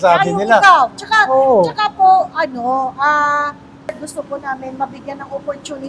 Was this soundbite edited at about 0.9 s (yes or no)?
no